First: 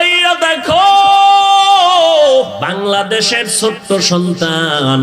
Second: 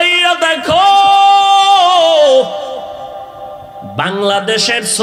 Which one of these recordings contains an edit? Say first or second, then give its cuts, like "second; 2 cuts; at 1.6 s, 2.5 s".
first; 1 cut; at 2.6 s